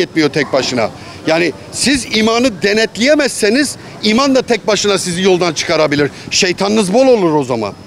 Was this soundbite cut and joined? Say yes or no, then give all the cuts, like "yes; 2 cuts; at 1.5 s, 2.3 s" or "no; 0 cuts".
no; 0 cuts